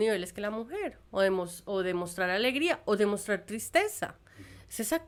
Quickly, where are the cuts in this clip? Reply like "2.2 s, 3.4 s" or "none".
none